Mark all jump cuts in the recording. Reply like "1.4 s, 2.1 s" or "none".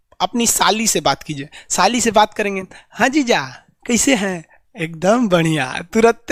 none